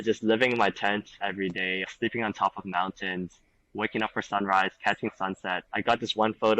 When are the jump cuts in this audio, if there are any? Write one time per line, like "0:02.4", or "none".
0:01.8
0:05.6